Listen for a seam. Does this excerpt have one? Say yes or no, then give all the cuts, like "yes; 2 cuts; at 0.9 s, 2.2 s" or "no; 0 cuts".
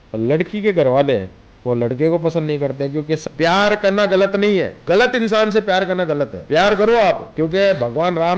yes; 4 cuts; at 3.2 s, 4.8 s, 6.4 s, 7.3 s